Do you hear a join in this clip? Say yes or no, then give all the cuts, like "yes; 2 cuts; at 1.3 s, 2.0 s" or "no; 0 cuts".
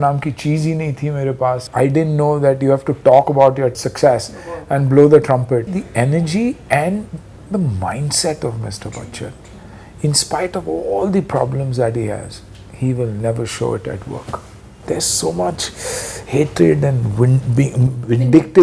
yes; 5 cuts; at 1.7 s, 3.8 s, 5.8 s, 7.4 s, 14.8 s